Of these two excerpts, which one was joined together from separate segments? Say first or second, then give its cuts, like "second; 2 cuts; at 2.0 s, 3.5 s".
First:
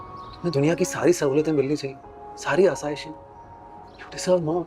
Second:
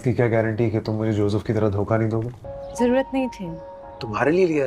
second; 1 cut; at 2.4 s